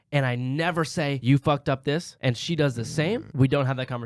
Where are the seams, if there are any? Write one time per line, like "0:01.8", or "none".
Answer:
0:01.2
0:02.1
0:03.3